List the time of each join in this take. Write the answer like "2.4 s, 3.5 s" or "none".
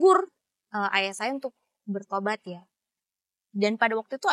none

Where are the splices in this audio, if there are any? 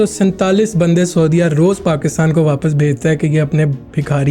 none

